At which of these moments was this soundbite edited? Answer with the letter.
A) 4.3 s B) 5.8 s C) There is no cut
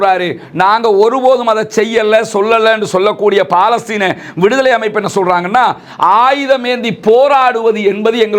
C